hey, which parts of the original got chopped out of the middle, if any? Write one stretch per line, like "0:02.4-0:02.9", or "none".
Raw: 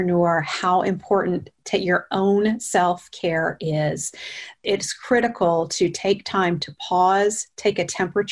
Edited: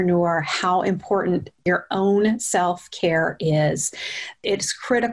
0:01.6-0:01.8